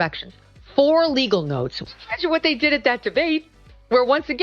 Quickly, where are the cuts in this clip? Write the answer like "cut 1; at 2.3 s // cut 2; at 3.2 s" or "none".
cut 1; at 1.7 s